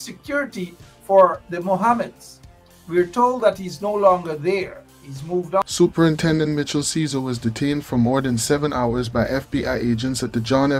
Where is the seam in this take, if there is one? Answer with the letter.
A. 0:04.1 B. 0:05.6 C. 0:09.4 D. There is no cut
B